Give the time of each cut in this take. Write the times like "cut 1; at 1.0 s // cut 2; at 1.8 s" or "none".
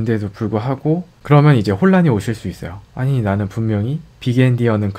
cut 1; at 1.1 s